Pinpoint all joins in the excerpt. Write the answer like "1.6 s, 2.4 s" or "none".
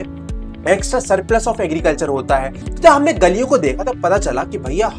2.6 s